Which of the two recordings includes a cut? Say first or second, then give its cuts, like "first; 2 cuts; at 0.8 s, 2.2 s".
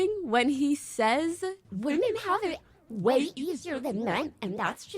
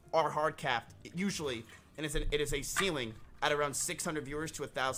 first; 1 cut; at 1.7 s